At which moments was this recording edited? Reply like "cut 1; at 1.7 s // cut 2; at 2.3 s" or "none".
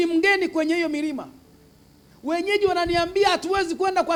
none